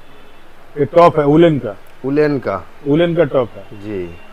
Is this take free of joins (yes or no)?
yes